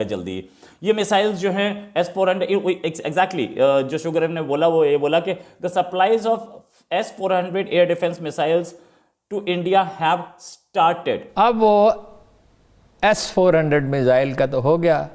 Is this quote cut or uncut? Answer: cut